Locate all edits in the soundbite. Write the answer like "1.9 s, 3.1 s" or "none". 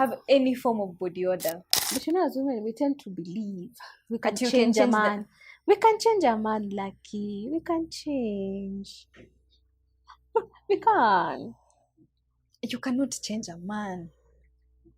1.7 s